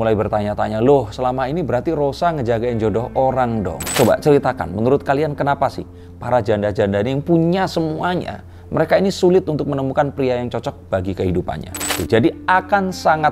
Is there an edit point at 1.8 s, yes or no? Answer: no